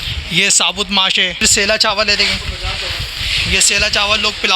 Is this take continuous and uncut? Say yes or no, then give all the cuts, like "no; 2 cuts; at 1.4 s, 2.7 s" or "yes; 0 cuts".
no; 1 cut; at 1.3 s